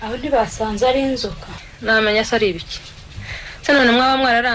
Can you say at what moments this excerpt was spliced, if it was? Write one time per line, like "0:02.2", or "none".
0:01.7